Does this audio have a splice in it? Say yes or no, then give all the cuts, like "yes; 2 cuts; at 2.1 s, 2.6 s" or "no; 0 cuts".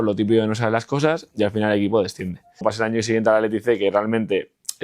yes; 1 cut; at 2.6 s